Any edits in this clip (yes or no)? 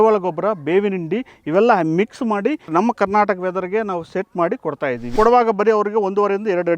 yes